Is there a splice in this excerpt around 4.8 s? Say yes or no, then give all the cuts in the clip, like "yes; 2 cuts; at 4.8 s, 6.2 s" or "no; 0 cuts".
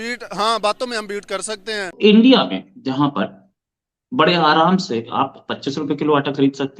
no; 1 cut; at 1.9 s